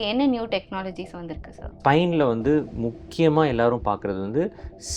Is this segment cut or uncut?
cut